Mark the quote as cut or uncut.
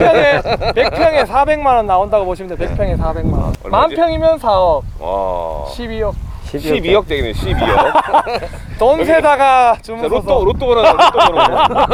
uncut